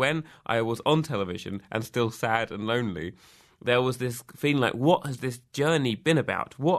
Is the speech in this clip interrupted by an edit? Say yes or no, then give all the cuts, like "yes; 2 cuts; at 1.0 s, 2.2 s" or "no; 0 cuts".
no; 0 cuts